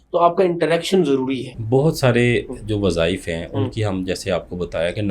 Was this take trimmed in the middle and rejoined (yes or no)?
yes